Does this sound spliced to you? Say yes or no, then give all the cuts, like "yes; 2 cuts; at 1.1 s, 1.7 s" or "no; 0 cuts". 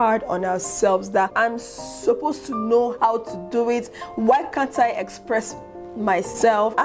yes; 1 cut; at 1.3 s